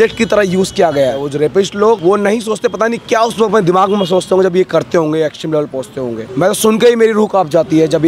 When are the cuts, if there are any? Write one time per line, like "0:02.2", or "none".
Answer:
0:01.6
0:06.2